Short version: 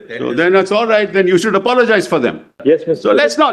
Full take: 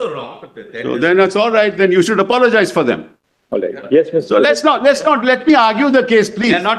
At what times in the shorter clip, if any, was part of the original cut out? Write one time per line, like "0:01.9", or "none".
0:02.5